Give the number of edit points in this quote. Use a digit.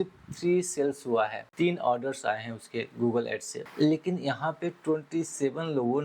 2